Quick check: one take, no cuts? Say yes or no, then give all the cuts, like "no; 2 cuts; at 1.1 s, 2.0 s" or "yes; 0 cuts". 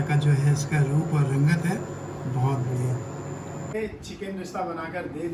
yes; 0 cuts